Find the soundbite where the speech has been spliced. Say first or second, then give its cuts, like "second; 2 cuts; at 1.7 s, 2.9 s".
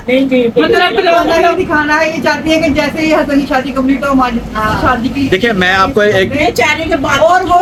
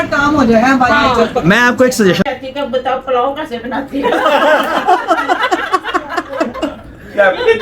second; 1 cut; at 2.2 s